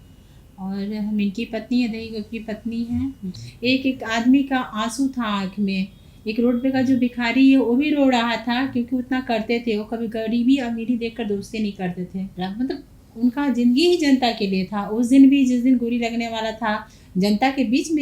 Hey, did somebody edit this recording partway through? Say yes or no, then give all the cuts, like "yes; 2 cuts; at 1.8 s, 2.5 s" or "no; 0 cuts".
yes; 2 cuts; at 3.3 s, 12.3 s